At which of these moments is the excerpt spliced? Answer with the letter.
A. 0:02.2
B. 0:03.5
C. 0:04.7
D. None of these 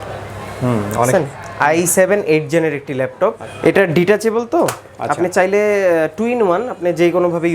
B